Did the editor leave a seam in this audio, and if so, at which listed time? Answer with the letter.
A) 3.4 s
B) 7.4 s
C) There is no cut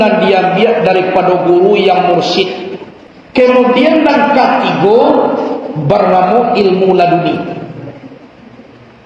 A